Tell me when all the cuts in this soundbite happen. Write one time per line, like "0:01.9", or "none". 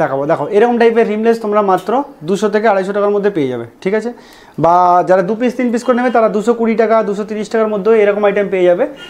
none